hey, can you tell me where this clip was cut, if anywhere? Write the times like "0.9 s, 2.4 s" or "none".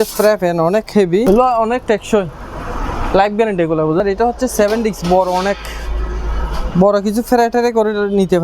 1.2 s, 4.0 s